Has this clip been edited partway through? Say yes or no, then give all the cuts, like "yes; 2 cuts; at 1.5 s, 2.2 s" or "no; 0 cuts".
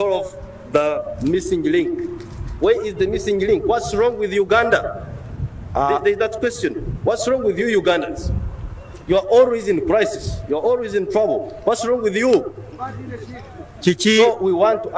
no; 0 cuts